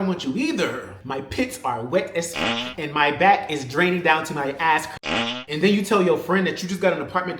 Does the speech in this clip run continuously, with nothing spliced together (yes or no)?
no